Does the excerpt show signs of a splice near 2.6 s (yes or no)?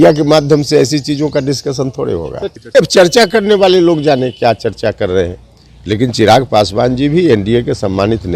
yes